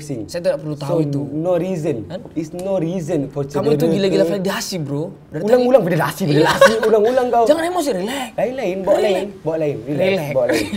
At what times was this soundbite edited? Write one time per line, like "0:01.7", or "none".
none